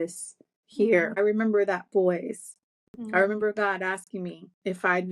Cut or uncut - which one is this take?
cut